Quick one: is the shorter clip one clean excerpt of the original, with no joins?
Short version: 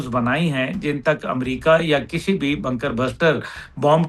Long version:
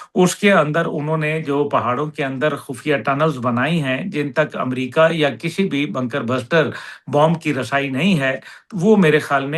yes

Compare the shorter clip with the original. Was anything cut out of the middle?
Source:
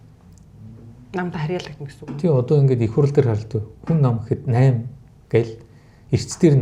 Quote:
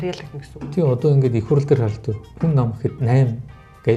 no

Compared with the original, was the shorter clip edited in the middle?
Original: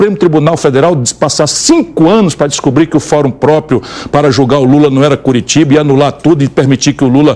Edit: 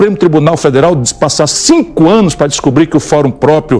no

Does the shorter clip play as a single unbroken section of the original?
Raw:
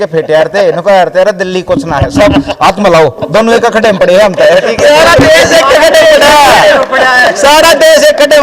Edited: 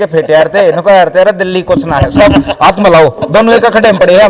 yes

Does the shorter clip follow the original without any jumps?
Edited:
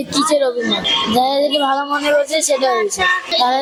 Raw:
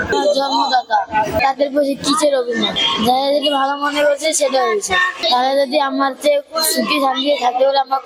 yes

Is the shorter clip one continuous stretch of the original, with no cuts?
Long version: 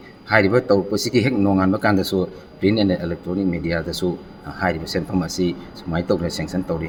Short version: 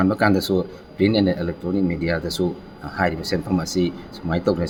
yes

